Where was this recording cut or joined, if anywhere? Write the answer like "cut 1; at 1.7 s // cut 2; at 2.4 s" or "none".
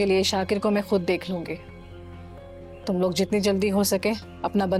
none